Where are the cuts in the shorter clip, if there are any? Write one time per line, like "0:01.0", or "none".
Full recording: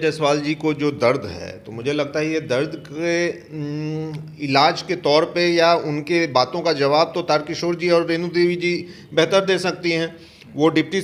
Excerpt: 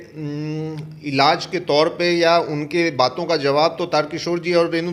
none